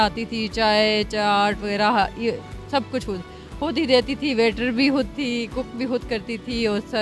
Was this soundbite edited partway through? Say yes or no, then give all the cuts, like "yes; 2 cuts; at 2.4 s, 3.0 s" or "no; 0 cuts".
no; 0 cuts